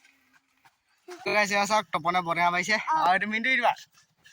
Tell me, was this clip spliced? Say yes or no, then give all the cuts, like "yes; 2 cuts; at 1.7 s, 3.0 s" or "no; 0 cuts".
yes; 1 cut; at 1.5 s